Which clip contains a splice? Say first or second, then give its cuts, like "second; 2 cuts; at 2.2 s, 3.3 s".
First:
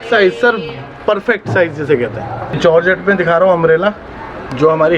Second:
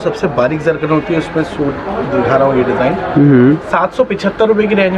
first; 1 cut; at 2.6 s